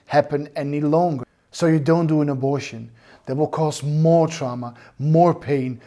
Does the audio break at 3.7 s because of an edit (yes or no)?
no